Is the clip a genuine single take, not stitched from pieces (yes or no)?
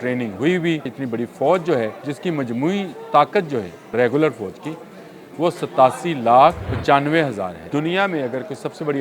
no